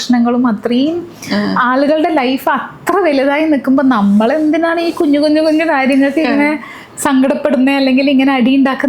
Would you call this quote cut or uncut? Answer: uncut